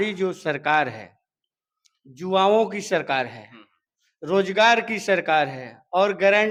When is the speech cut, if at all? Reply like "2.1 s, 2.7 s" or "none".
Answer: none